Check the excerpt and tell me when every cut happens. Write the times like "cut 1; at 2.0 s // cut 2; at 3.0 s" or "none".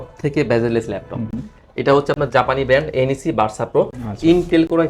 none